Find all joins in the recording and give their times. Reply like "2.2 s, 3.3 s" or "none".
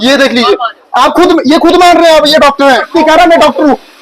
2.9 s

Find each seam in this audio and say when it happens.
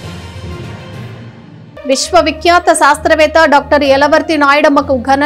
1.7 s

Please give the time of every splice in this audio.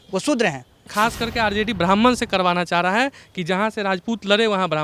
0.9 s

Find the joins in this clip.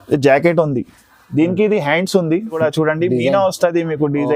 2.6 s

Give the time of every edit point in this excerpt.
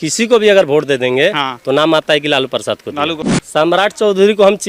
3.3 s

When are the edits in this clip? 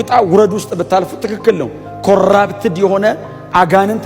none

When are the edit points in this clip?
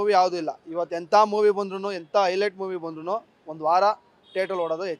none

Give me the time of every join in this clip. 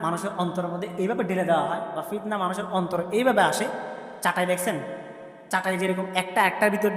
4.1 s

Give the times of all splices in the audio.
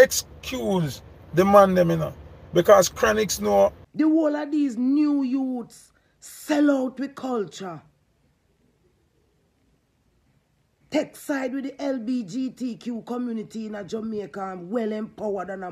3.8 s

